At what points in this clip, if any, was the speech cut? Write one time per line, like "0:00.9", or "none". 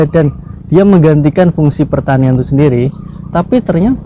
none